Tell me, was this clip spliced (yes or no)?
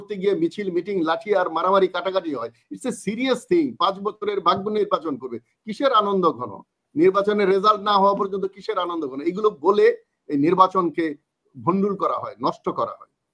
no